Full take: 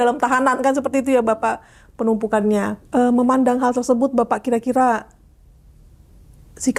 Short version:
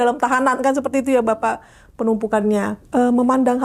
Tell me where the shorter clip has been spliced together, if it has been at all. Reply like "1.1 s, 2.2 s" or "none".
none